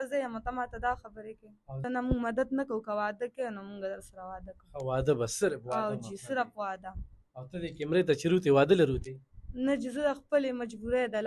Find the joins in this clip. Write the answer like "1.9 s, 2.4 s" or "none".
1.8 s